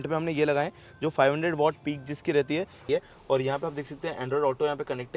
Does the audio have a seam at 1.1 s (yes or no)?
no